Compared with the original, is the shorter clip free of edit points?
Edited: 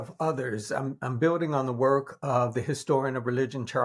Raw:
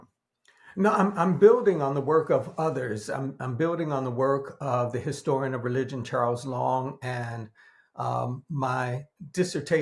yes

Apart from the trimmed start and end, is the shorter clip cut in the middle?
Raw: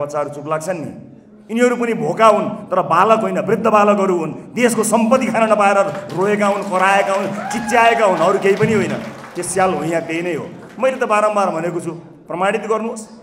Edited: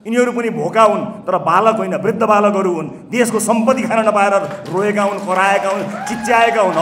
no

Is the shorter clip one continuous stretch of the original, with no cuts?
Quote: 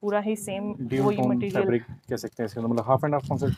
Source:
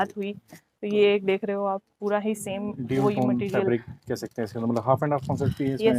yes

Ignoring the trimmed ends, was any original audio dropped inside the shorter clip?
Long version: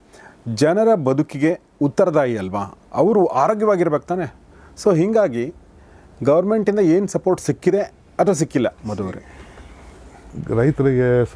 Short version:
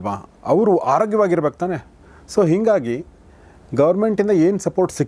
no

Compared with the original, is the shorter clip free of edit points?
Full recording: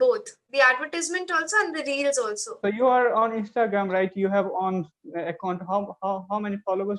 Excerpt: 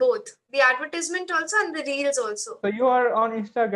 yes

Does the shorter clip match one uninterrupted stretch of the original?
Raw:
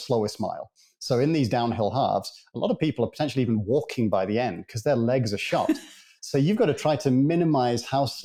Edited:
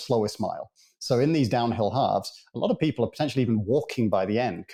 yes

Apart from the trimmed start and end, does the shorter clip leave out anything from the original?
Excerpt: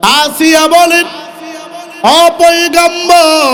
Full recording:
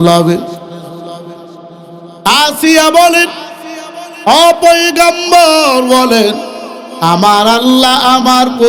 no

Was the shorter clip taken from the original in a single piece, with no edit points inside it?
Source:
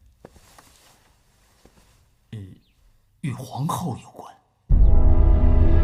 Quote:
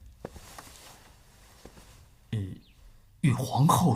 yes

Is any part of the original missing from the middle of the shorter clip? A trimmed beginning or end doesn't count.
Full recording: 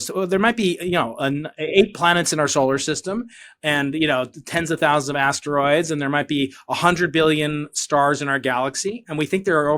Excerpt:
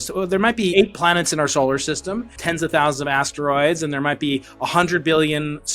yes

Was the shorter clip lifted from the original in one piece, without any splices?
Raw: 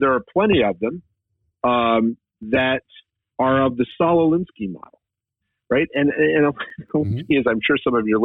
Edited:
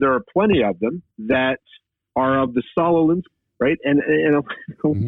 no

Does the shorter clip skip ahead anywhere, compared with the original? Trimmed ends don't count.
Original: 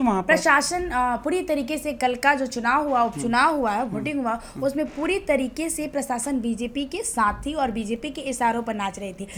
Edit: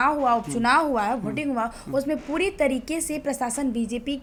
no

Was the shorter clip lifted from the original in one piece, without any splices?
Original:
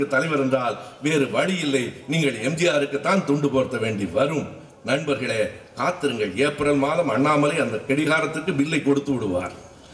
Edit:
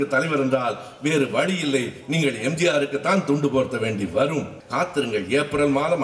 no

